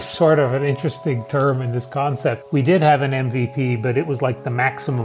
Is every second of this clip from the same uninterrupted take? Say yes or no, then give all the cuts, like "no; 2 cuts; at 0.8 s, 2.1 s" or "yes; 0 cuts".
no; 1 cut; at 2.4 s